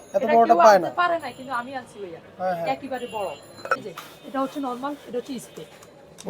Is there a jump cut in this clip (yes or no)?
yes